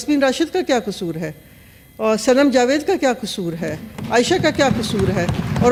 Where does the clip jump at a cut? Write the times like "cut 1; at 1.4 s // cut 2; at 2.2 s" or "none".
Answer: none